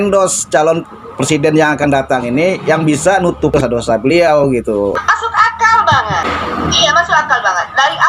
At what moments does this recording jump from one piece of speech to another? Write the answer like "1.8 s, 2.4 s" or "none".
3.5 s, 5.0 s, 6.3 s

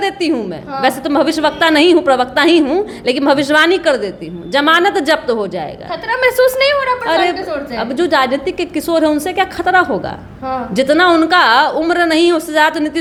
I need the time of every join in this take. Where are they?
none

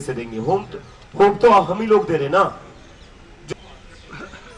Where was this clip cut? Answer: 3.5 s

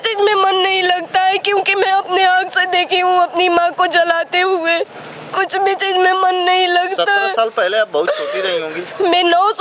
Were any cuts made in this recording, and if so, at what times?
none

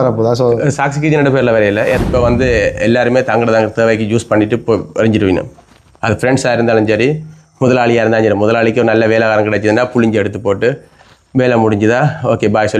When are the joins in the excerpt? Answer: 2.0 s

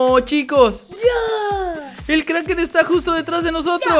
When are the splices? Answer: none

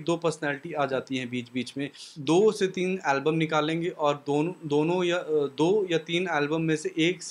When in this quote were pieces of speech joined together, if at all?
2.0 s

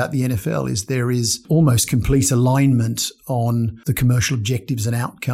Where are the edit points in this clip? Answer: 1.4 s, 3.8 s

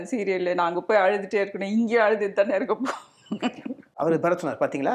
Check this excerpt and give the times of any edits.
3.9 s

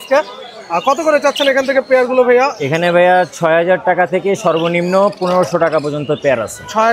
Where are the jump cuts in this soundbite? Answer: none

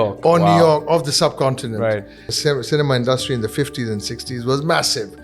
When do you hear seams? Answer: 2.2 s

